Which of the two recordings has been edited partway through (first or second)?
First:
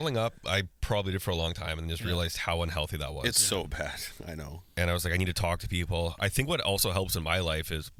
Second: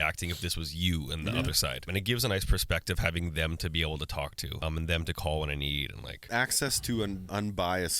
second